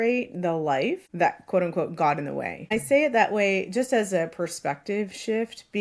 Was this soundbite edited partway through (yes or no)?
yes